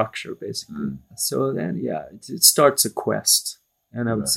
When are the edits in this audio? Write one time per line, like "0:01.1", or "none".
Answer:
0:01.1